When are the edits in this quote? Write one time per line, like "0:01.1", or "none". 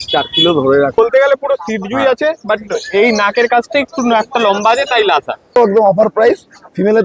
0:01.0
0:05.6